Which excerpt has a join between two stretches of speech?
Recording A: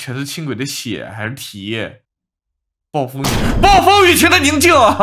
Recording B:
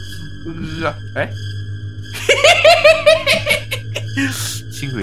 A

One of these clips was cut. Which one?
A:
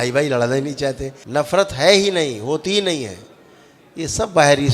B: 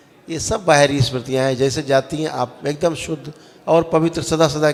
A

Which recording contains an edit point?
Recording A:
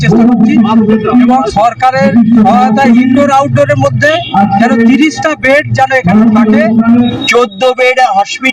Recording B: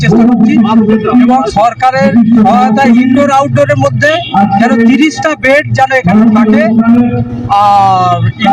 A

